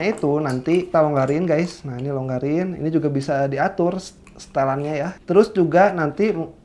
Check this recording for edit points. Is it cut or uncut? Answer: cut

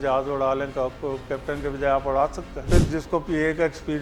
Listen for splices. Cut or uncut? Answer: cut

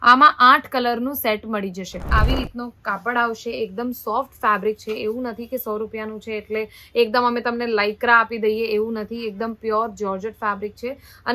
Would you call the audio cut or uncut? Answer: cut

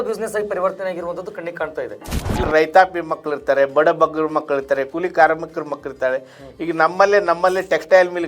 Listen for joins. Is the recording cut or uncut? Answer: cut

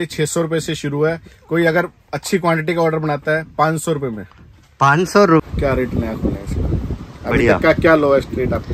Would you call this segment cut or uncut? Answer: cut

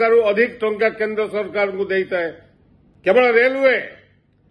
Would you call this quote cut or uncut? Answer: cut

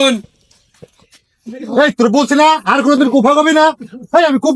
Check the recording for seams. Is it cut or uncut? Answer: uncut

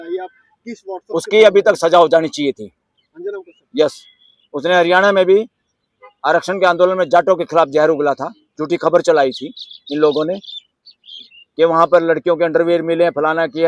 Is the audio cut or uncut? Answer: uncut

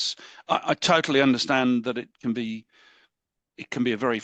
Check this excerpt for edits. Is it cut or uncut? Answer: uncut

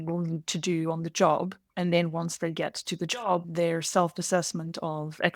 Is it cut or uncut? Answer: cut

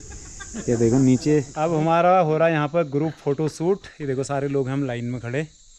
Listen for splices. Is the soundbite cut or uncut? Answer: cut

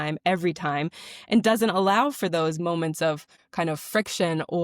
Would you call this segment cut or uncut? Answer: cut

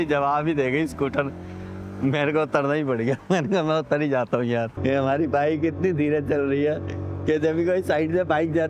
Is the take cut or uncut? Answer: uncut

